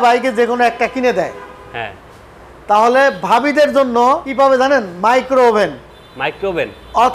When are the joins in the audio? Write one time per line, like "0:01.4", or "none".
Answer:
0:04.3